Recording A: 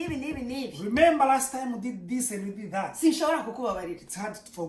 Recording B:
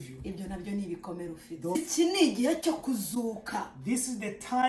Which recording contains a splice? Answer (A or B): B